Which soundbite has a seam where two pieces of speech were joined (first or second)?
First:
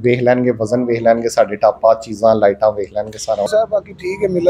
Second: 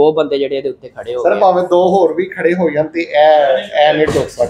first